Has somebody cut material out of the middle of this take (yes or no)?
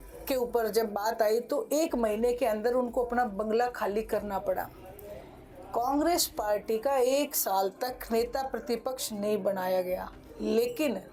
no